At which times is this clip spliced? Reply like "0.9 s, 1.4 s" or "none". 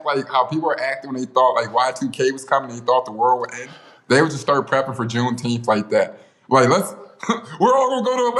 none